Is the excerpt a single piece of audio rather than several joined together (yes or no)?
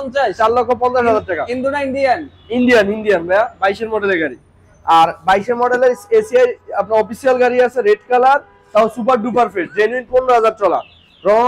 yes